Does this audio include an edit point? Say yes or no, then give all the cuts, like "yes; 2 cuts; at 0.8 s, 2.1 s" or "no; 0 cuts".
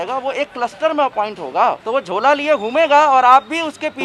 yes; 1 cut; at 1.8 s